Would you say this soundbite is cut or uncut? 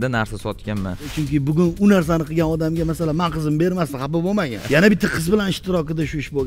cut